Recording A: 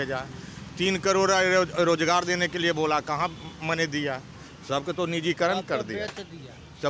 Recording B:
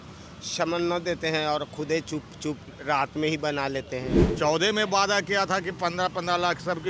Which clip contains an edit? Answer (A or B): B